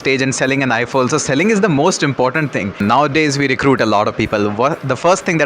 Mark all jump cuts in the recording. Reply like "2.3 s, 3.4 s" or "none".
2.8 s